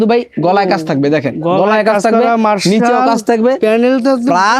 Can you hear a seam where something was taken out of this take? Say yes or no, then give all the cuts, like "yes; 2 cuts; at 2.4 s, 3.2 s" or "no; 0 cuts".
no; 0 cuts